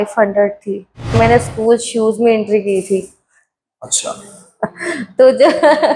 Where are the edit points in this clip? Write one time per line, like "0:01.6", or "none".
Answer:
0:01.1